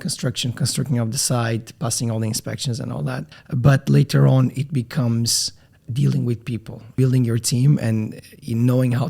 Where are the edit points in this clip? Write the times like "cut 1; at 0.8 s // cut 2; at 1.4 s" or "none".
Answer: cut 1; at 3.3 s // cut 2; at 6.9 s